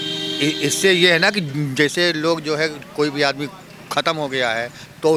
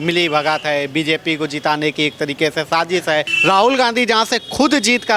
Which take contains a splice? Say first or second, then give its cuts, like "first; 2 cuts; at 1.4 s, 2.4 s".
second; 1 cut; at 3.3 s